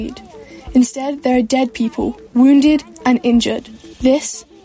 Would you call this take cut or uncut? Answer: uncut